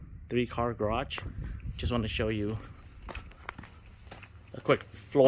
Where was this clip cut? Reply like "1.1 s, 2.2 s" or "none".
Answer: none